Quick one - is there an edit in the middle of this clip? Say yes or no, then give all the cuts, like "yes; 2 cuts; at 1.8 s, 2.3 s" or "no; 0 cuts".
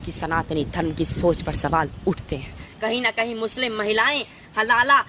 yes; 1 cut; at 2.7 s